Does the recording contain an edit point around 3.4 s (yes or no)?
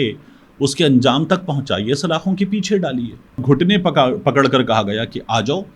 yes